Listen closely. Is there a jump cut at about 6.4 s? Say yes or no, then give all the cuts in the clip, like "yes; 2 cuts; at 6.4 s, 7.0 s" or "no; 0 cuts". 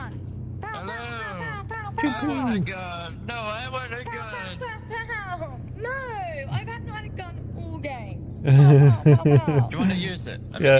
no; 0 cuts